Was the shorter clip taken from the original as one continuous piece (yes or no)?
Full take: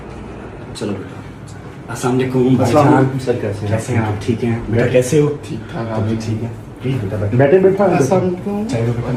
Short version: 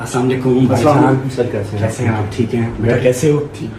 yes